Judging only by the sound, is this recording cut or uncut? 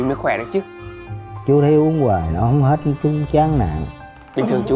cut